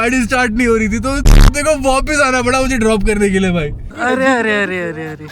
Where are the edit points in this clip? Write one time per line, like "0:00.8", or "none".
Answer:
0:03.9